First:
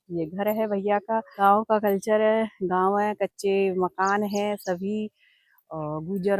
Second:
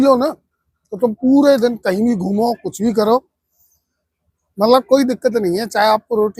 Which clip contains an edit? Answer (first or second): first